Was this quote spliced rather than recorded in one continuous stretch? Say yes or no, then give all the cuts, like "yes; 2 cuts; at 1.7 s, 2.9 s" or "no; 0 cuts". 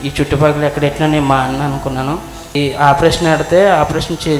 yes; 1 cut; at 2.5 s